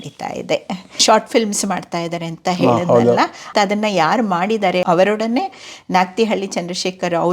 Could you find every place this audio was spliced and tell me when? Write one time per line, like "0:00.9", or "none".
0:00.9
0:03.4
0:04.8

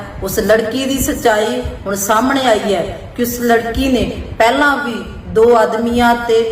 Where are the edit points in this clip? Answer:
none

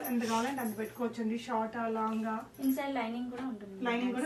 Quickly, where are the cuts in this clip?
none

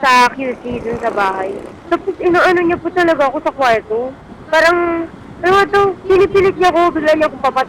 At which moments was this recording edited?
none

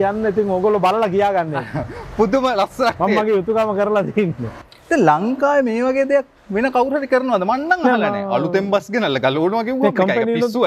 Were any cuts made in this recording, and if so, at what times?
0:04.5

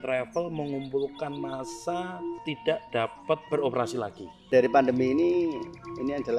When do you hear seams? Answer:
0:02.4
0:03.4
0:04.5

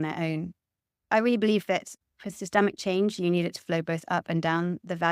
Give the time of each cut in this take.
0:01.1
0:02.0

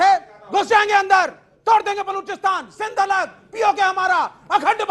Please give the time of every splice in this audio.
none

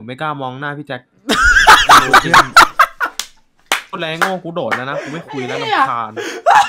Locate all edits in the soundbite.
none

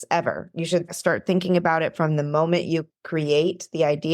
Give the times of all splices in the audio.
0:00.9
0:03.0

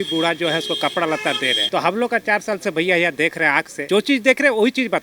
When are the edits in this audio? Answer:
0:01.6
0:03.8

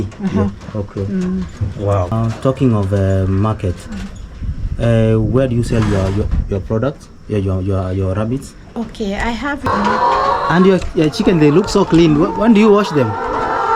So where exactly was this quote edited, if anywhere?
0:02.1
0:09.6

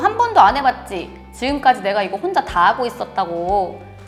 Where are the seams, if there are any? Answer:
none

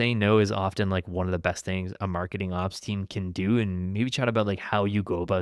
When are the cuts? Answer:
none

